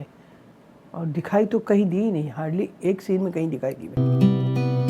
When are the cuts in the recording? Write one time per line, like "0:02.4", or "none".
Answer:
0:03.8